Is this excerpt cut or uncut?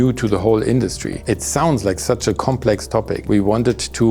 cut